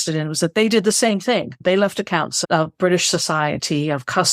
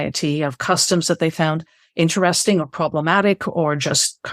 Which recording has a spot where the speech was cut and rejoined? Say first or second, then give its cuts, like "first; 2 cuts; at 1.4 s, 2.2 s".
first; 1 cut; at 1.6 s